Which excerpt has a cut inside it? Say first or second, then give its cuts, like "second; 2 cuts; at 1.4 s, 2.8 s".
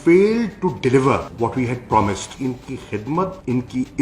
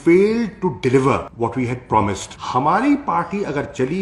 first; 1 cut; at 2.3 s